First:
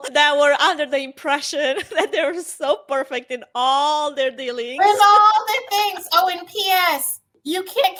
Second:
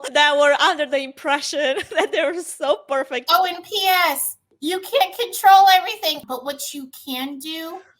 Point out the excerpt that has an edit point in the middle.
second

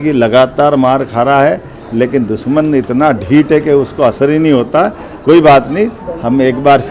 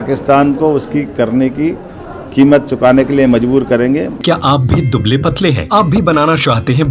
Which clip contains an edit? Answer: second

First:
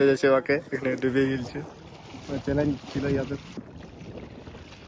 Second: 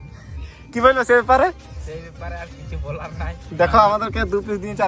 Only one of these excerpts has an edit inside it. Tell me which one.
first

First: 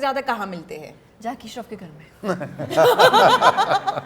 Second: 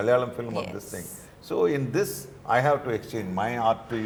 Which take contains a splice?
first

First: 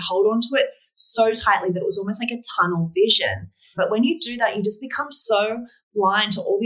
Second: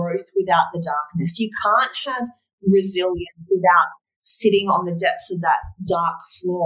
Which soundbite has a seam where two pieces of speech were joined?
first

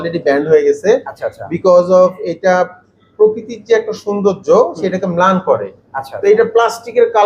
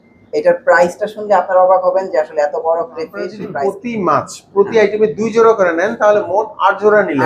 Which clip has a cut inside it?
second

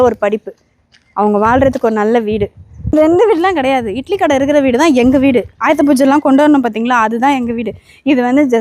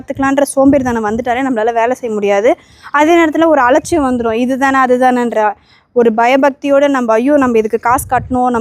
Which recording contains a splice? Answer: first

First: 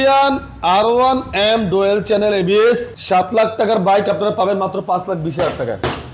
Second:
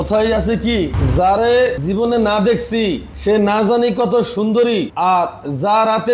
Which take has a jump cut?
second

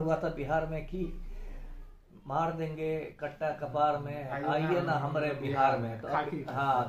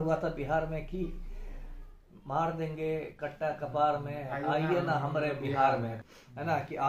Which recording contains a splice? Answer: second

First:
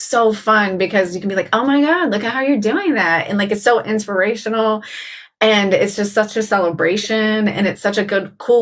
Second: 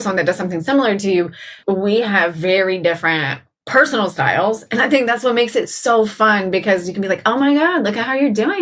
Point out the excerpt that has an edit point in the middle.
second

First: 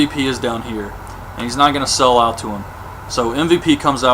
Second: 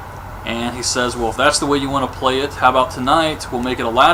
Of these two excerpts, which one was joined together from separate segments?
first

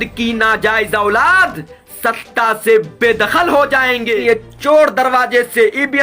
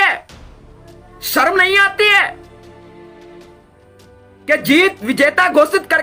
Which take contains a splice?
first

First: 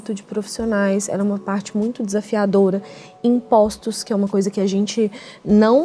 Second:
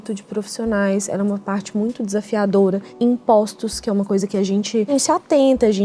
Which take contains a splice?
second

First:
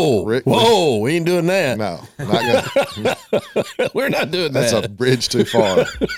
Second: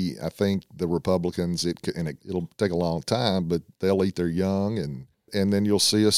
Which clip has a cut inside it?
second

